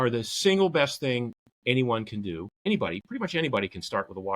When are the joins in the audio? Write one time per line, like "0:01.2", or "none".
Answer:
0:02.6